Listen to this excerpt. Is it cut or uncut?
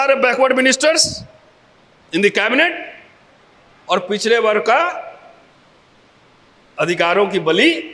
uncut